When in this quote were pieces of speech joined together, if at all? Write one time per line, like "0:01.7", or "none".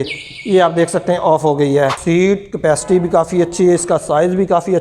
0:02.0